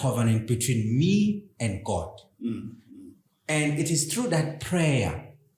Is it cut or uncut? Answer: uncut